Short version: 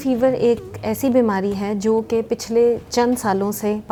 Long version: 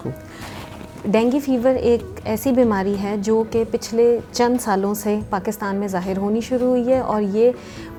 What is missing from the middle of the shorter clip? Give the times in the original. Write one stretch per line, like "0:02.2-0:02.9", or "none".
none